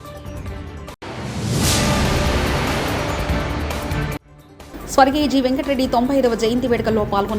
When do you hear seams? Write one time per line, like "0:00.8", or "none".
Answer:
0:00.9